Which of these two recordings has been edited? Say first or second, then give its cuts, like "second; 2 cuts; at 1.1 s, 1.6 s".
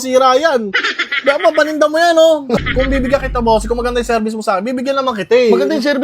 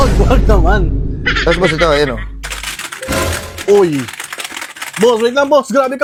first; 1 cut; at 2.6 s